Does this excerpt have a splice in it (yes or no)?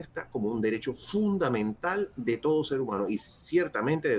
no